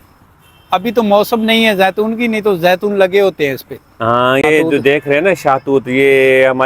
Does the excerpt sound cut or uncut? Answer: cut